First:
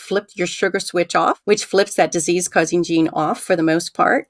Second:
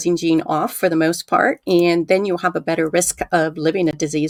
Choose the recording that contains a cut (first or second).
first